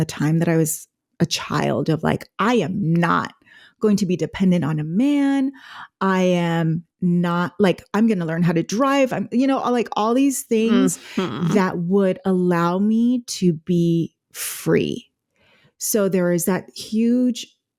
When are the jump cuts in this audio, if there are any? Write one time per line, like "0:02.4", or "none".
none